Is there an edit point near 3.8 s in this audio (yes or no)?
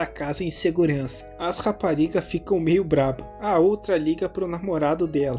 no